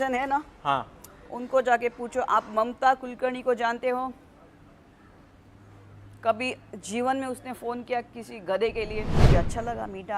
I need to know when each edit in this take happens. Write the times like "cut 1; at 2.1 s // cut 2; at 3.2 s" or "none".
cut 1; at 9.2 s